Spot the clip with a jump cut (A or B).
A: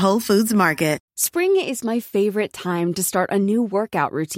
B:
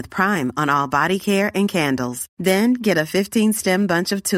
A